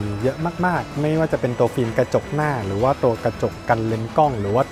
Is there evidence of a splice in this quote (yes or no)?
no